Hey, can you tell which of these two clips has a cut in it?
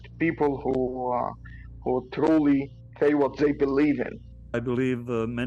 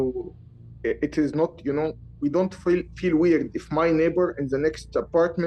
first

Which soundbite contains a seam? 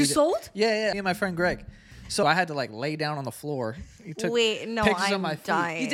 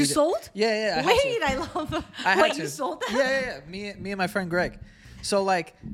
first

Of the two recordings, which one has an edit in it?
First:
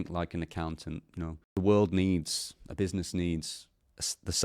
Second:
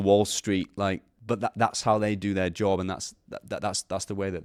first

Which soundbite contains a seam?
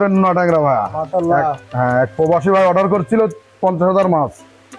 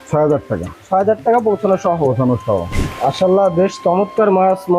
second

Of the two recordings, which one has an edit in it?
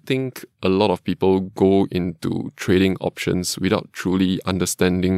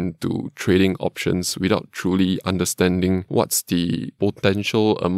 second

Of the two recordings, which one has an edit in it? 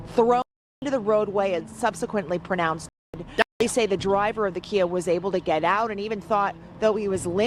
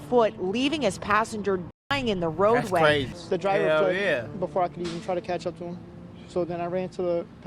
second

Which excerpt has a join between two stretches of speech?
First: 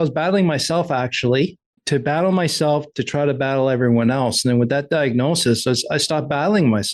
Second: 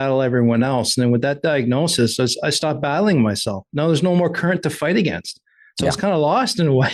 first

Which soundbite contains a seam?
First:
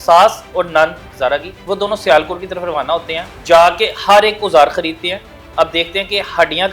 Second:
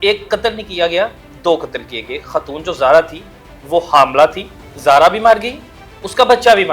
first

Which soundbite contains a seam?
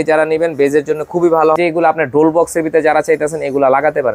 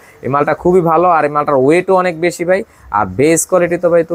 first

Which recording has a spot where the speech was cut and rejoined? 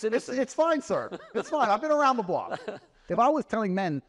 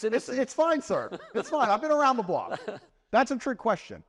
first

